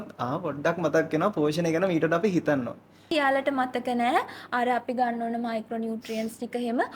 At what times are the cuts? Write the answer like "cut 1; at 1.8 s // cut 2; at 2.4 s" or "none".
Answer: cut 1; at 3.1 s

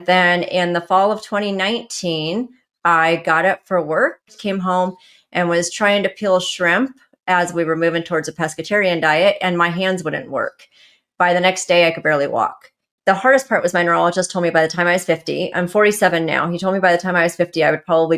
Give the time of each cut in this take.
cut 1; at 4.4 s // cut 2; at 12.9 s

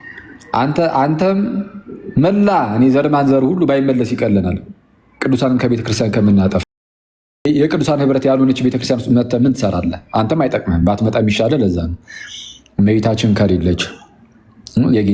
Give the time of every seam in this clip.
none

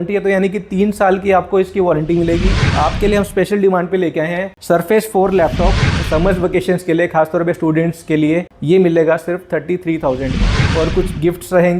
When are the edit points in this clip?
cut 1; at 2.6 s // cut 2; at 5.8 s // cut 3; at 10.6 s

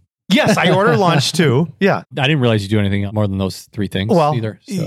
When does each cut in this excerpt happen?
cut 1; at 3.1 s

